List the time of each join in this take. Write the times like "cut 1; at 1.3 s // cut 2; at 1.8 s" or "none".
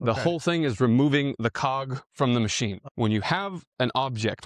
cut 1; at 2.8 s

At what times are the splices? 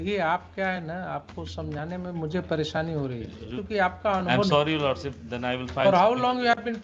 cut 1; at 3.6 s

